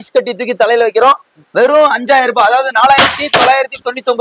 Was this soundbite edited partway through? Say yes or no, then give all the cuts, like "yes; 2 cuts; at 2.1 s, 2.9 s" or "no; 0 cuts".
no; 0 cuts